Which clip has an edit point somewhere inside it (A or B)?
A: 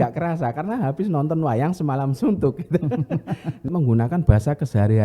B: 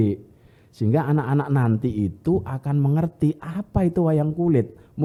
A